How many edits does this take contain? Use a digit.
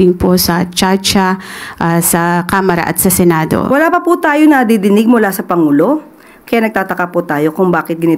1